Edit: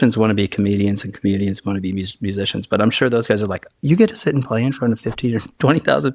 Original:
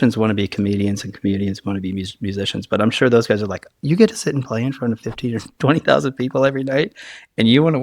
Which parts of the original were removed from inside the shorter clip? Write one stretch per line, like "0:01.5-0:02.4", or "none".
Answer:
none